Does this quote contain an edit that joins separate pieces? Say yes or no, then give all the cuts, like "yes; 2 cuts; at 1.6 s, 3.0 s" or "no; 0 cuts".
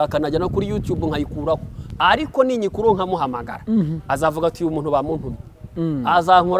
no; 0 cuts